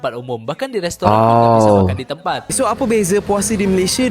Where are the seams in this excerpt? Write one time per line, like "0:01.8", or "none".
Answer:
0:02.5